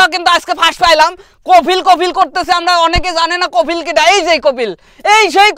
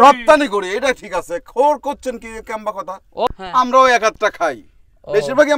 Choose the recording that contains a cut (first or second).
second